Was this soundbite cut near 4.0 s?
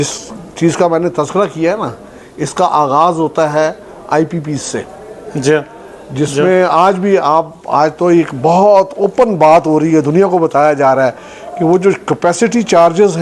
no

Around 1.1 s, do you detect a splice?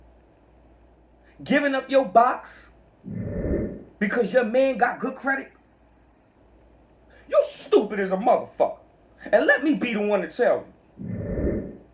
yes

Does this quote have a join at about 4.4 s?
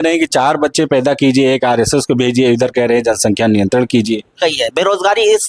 yes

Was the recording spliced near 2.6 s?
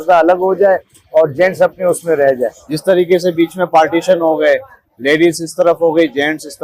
no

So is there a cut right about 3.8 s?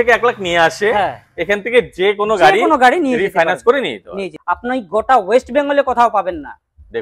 yes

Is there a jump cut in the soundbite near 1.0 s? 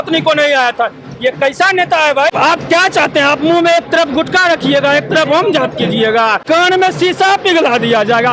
no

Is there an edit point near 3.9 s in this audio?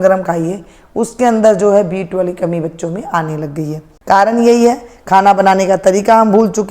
yes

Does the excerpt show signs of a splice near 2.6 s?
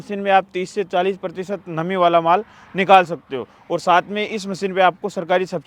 no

